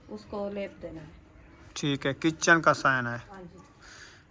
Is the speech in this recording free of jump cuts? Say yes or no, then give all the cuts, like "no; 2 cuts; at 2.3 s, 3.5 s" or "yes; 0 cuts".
yes; 0 cuts